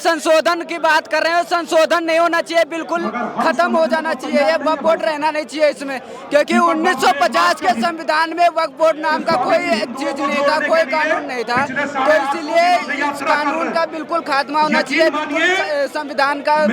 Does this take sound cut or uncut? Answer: uncut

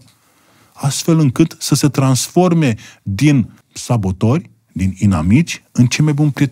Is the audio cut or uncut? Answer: cut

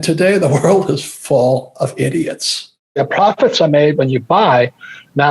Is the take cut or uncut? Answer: cut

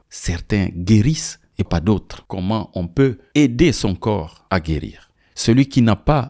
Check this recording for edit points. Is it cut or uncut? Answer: cut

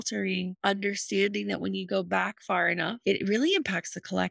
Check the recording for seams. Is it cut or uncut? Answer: cut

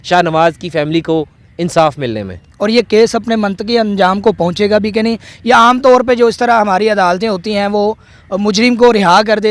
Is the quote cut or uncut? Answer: cut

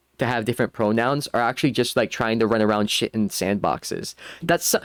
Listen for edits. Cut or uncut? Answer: uncut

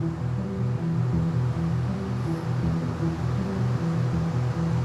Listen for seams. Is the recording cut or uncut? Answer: uncut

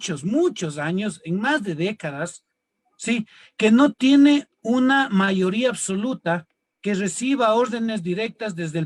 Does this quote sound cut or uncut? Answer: uncut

